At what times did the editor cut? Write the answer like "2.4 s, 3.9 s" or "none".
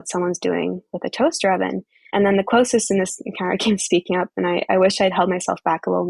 none